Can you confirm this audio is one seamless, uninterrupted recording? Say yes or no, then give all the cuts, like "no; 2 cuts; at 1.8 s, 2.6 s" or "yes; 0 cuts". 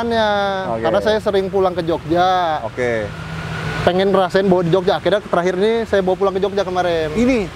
yes; 0 cuts